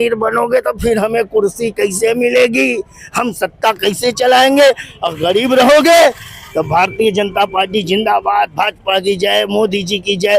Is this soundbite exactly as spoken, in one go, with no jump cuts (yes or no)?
yes